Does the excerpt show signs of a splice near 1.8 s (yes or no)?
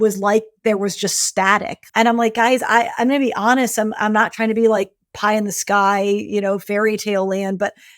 yes